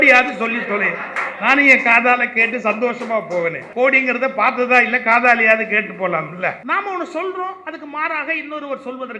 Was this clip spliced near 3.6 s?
yes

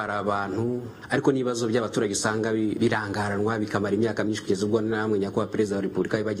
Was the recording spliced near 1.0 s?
yes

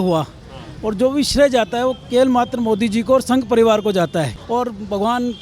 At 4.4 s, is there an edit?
yes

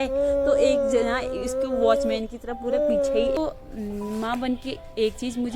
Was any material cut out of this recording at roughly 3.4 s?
yes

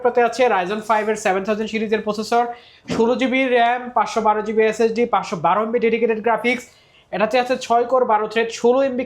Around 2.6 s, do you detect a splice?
no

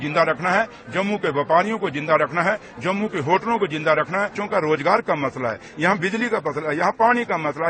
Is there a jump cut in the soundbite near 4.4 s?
yes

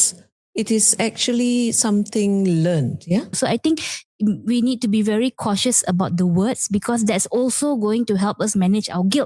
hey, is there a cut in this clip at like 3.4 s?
yes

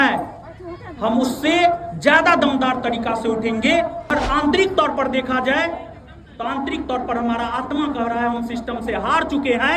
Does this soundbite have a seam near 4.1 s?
yes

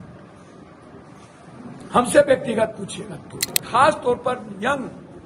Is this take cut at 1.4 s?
no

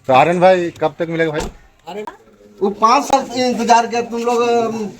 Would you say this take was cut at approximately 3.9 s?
no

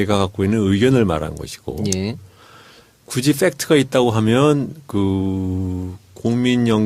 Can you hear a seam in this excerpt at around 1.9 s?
yes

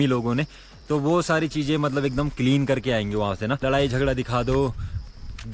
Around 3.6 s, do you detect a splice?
yes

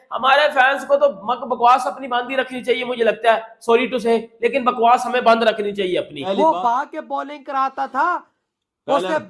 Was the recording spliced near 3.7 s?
no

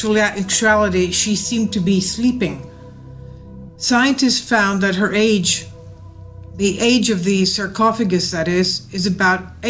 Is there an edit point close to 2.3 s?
no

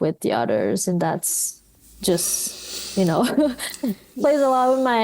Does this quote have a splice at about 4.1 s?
yes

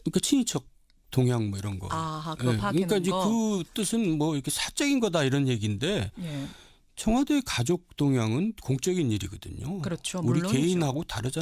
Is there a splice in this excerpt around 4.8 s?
yes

